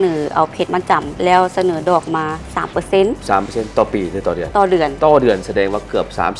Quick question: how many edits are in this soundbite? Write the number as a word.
zero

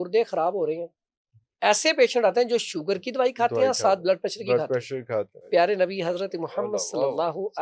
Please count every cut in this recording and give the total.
one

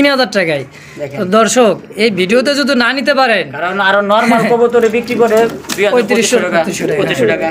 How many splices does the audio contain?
zero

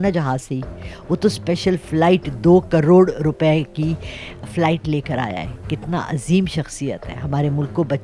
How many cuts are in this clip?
zero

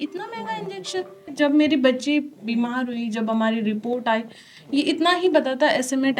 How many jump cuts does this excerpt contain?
one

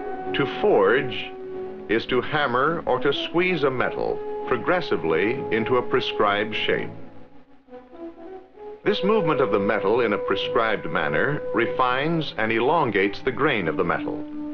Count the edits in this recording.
one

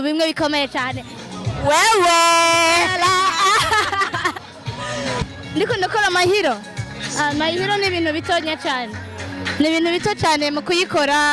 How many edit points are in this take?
one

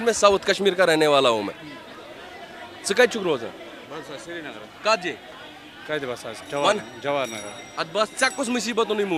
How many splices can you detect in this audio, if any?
zero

